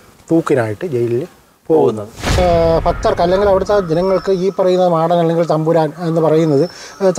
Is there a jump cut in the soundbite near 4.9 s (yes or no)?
no